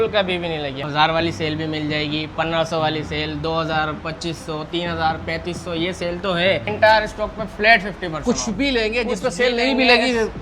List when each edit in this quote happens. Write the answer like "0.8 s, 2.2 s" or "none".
0.8 s, 6.7 s